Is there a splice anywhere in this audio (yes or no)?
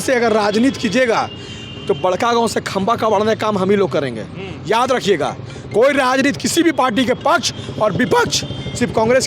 no